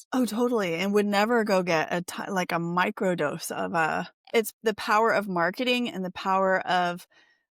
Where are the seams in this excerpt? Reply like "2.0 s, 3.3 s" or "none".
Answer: 4.2 s